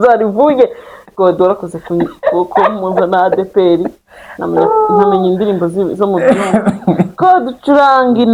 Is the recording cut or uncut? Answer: uncut